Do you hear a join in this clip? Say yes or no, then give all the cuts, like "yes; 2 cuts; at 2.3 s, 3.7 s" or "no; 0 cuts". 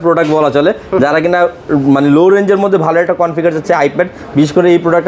no; 0 cuts